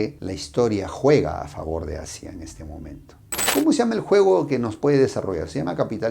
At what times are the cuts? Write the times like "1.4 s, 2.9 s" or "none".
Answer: 3.4 s

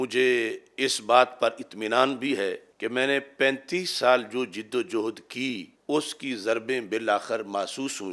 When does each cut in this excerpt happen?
2.7 s, 5.7 s

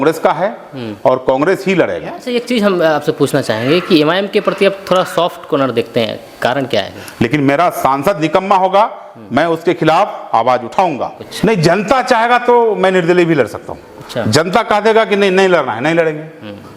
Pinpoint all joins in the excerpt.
2.2 s, 7.0 s, 11.3 s

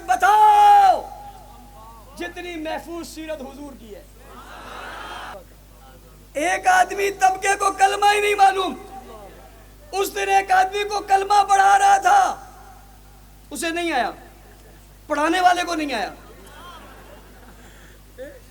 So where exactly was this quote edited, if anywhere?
5.3 s

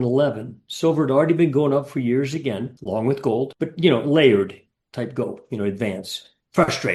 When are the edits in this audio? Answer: none

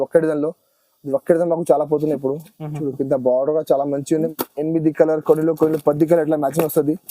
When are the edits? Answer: 4.3 s

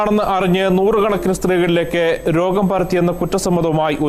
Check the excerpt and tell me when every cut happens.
none

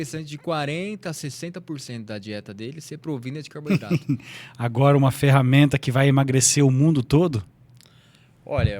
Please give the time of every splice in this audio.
3.6 s

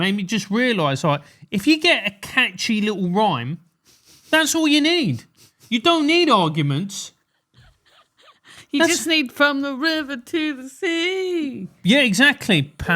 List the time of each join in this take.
none

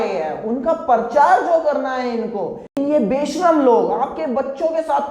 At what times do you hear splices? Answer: 2.7 s

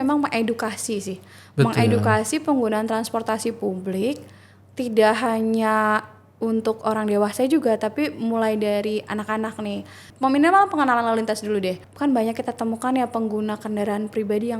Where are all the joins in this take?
10.1 s, 11.8 s

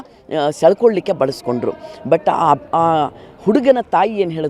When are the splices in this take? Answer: none

